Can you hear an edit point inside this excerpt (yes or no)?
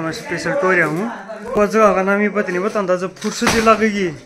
yes